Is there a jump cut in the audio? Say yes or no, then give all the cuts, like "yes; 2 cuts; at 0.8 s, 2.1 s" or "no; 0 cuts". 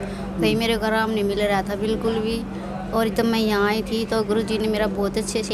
no; 0 cuts